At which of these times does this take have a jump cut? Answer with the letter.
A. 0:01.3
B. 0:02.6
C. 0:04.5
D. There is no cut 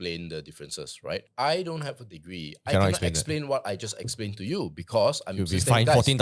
A